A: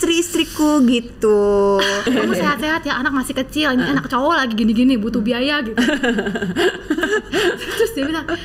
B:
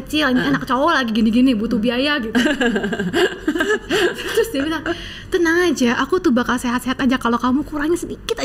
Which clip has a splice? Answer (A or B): A